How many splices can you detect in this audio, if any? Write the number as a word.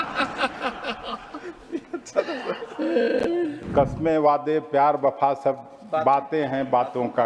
one